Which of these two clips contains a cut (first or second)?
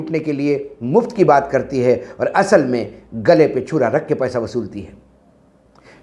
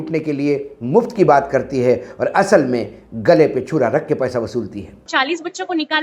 second